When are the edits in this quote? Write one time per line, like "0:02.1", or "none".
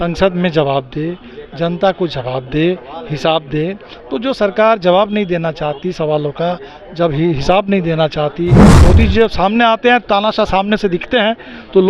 0:08.7